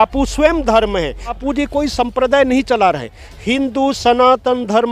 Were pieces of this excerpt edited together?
yes; 1 cut; at 1.4 s

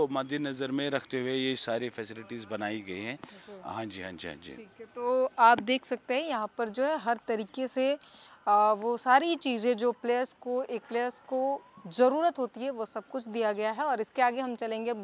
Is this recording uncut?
yes; 0 cuts

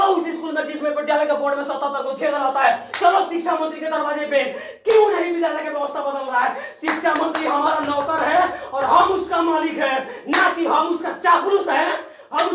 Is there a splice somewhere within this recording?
no; 0 cuts

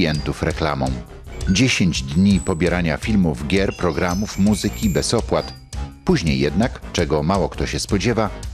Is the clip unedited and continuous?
yes; 0 cuts

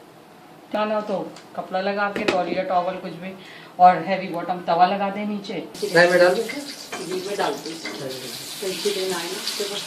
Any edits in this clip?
yes; 2 cuts; at 0.7 s, 5.7 s

